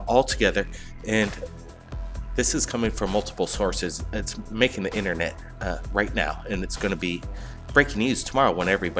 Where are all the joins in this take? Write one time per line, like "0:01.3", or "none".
0:04.0